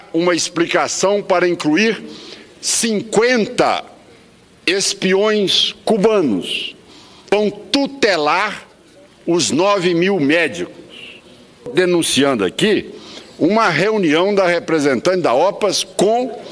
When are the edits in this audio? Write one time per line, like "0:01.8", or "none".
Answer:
0:07.3
0:11.7